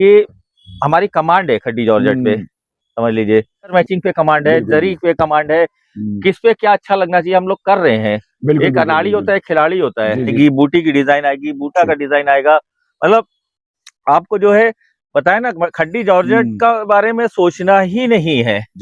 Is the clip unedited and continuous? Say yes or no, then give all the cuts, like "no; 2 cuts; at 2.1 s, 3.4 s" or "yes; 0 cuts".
no; 2 cuts; at 3.7 s, 10.3 s